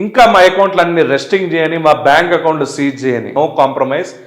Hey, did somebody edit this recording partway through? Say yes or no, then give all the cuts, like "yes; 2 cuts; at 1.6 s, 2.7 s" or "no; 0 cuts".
yes; 1 cut; at 3.3 s